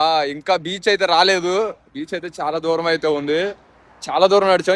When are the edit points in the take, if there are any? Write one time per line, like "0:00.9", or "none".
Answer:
none